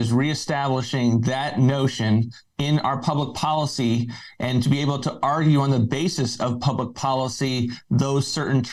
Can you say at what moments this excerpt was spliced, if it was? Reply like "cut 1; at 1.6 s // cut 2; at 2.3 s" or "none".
none

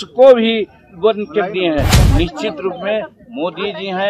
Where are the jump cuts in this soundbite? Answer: cut 1; at 2.0 s

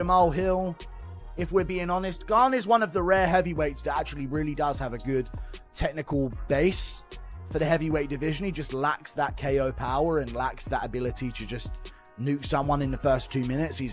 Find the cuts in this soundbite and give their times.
none

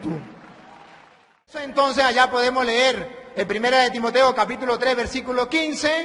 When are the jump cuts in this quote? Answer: cut 1; at 1.7 s

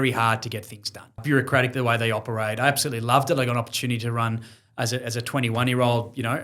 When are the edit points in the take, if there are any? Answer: cut 1; at 1.2 s

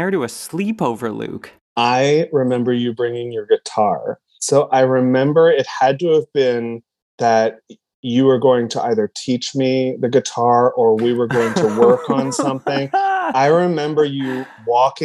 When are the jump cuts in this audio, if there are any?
none

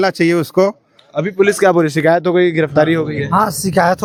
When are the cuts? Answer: none

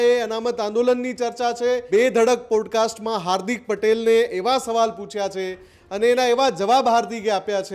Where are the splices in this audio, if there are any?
cut 1; at 1.8 s

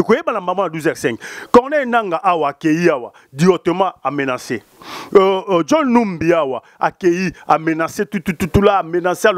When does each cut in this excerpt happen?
none

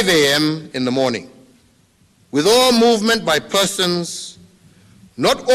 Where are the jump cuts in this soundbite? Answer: cut 1; at 1.4 s

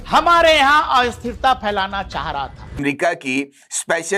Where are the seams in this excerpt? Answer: cut 1; at 2.8 s

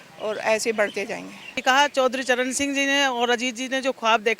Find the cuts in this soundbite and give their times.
cut 1; at 1.6 s

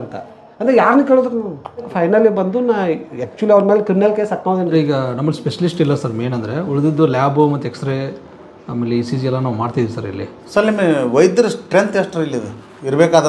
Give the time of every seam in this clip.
cut 1; at 4.7 s

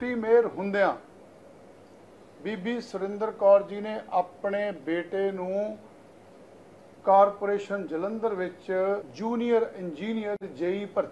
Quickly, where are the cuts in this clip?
cut 1; at 9.1 s

